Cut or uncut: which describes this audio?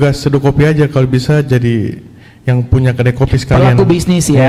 uncut